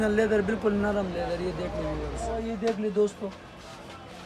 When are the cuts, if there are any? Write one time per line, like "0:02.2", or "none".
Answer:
0:02.4